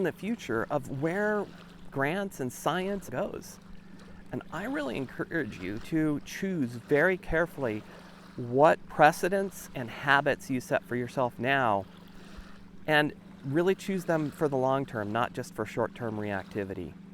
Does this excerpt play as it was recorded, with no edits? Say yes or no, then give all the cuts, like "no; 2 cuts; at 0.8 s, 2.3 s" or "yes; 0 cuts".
no; 2 cuts; at 1.9 s, 3.1 s